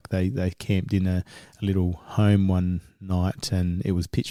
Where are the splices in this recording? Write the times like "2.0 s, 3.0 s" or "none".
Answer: none